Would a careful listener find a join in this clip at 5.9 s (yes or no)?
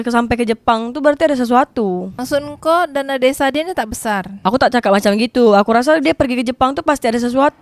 no